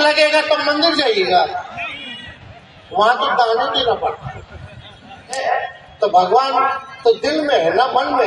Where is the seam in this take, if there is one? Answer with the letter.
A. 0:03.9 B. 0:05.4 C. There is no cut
B